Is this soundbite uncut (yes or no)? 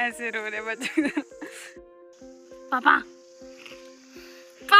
no